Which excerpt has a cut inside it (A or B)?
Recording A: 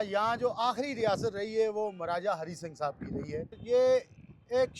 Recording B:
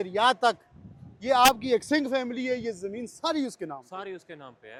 A